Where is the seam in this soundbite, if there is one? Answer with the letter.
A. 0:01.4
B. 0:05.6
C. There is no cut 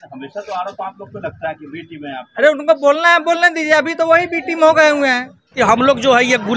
B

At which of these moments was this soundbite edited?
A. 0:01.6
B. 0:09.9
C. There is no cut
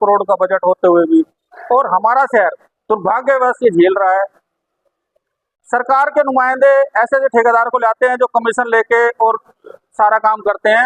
C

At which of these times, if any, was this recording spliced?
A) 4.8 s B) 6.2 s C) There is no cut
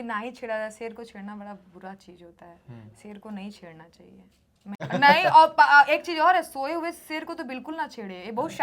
A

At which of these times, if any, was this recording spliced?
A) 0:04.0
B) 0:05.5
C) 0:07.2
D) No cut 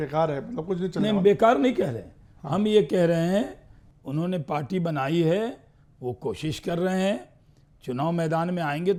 D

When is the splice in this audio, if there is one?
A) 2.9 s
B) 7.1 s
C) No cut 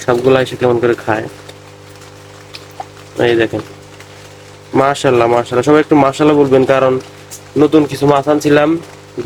C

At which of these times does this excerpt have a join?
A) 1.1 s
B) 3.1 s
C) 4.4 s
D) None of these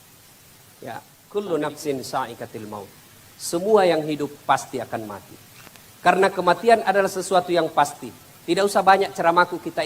A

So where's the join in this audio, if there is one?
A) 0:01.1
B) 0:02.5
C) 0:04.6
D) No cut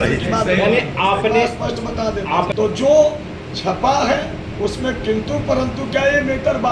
B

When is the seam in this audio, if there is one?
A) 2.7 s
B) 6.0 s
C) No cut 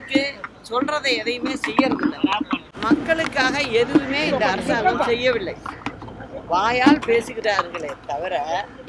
A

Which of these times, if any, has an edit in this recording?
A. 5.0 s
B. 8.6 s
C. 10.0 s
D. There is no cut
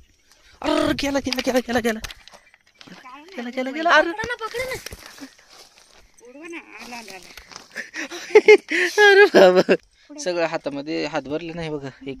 C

